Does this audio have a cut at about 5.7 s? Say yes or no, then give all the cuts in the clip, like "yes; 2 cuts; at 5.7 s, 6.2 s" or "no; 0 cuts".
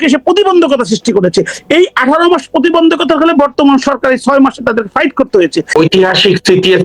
yes; 1 cut; at 5.7 s